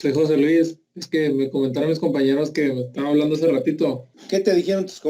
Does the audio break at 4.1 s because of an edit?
yes; 1 cut; at 4.1 s

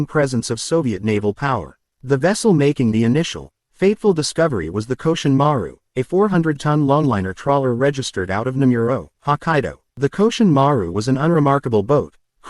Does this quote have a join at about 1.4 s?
yes; 2 cuts; at 1.4 s, 9.8 s

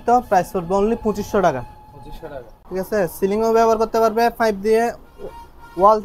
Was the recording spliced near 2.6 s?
yes; 1 cut; at 2.6 s

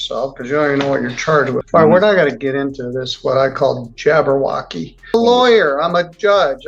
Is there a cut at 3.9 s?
no; 2 cuts; at 1.6 s, 5.1 s

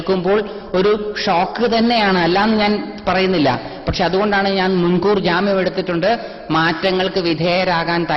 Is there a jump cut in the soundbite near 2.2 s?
no; 0 cuts

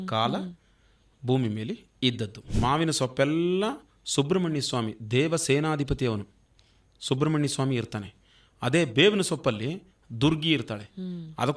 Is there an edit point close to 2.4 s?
yes; 1 cut; at 2.4 s

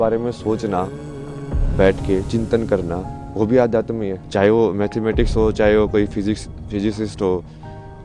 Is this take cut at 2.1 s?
no; 1 cut; at 4.2 s

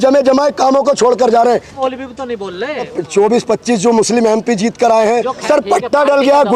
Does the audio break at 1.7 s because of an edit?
yes; 3 cuts; at 1.7 s, 3.0 s, 5.4 s

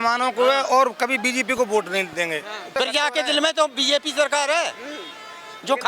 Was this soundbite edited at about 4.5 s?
no; 1 cut; at 2.7 s

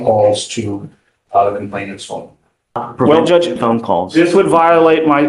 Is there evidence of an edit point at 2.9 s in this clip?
yes; 1 cut; at 2.9 s

